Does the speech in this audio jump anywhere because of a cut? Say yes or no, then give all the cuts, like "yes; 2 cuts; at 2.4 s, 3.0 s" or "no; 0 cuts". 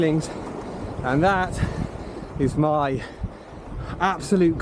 no; 0 cuts